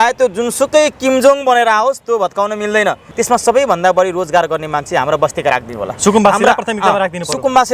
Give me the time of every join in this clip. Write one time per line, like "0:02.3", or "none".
0:03.0